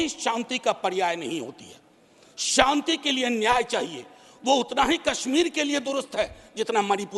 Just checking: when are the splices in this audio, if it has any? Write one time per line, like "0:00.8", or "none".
none